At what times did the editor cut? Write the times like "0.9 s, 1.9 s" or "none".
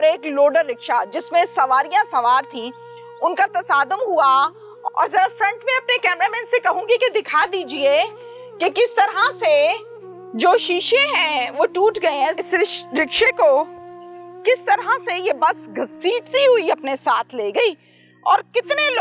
4.7 s, 12.3 s